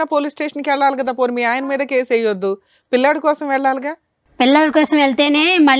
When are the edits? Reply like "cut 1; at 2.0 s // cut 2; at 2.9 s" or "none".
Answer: none